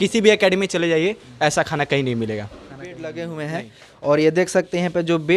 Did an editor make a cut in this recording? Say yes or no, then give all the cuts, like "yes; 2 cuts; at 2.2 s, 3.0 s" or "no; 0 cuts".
yes; 1 cut; at 2.9 s